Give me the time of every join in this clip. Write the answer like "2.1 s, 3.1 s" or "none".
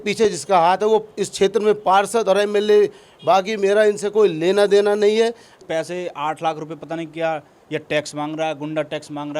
3.1 s, 5.5 s